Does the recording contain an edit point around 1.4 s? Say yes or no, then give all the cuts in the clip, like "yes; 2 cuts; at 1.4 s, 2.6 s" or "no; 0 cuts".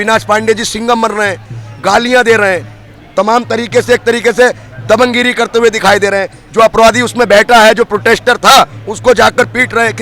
no; 0 cuts